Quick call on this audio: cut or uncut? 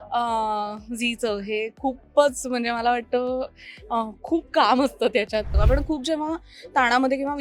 cut